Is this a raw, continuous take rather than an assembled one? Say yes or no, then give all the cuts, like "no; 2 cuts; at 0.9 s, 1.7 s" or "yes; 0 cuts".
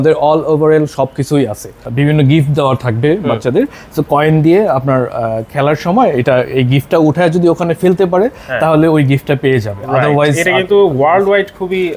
no; 1 cut; at 1.8 s